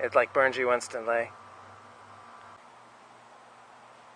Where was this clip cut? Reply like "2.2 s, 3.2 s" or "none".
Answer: 2.6 s